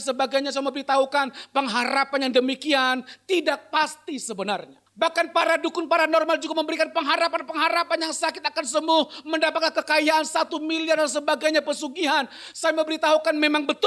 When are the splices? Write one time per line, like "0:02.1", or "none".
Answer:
0:04.8